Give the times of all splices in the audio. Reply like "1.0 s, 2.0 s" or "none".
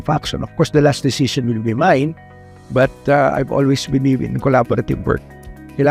none